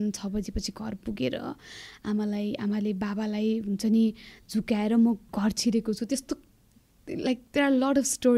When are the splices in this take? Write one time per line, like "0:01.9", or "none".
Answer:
none

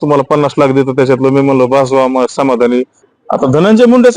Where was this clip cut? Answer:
0:03.0

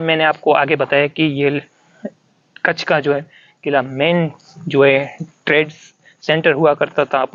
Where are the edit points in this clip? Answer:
none

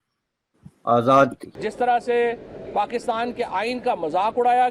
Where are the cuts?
0:01.4

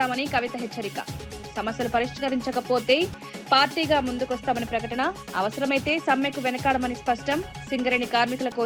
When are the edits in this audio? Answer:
none

